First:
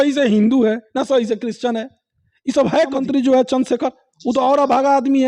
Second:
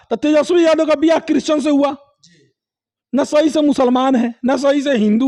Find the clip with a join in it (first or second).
first